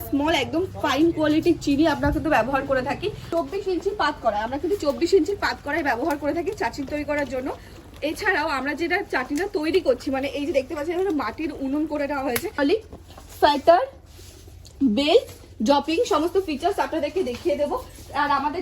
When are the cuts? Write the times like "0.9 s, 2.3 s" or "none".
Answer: 3.2 s, 12.6 s